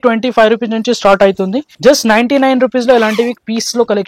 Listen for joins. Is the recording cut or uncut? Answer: cut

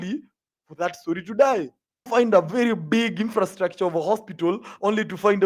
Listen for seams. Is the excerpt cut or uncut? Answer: cut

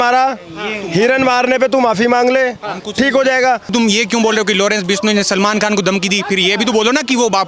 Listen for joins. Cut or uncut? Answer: cut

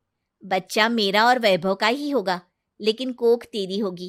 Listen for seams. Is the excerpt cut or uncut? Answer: uncut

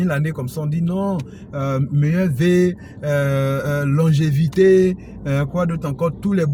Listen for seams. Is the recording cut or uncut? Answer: uncut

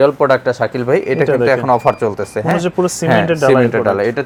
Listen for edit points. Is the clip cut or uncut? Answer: uncut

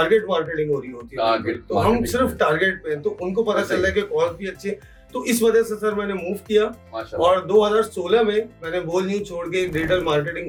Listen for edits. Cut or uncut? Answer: uncut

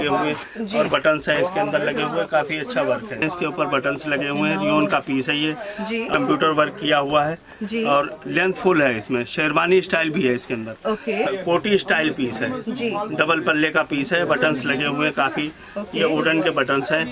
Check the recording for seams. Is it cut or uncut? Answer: cut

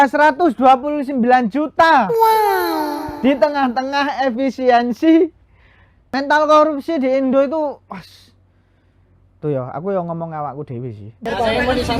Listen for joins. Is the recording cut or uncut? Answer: cut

